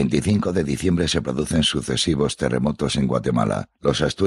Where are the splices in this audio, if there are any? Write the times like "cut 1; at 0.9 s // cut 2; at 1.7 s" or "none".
cut 1; at 3.1 s